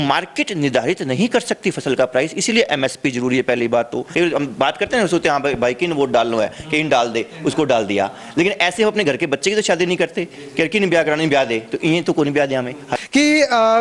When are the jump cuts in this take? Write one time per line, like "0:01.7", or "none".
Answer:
0:04.0
0:12.9